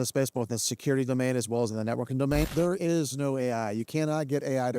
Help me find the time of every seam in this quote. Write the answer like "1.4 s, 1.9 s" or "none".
2.5 s